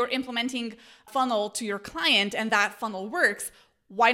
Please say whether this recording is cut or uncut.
cut